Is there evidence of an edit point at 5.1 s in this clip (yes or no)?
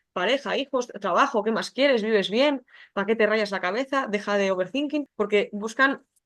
yes